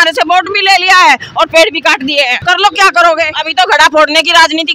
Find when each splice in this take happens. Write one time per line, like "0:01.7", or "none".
0:02.4
0:03.4